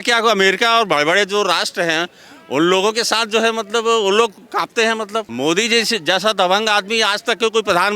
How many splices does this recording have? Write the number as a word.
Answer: one